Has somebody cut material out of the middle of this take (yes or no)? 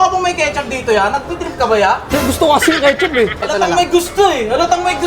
yes